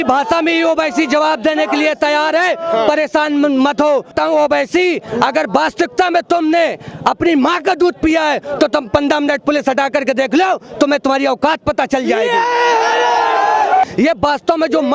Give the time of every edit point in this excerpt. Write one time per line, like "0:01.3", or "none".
0:04.1
0:13.8